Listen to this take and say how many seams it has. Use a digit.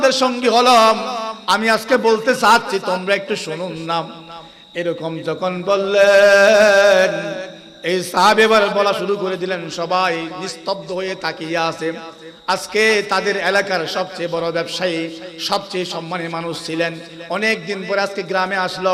0